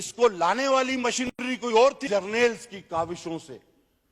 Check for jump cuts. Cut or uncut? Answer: cut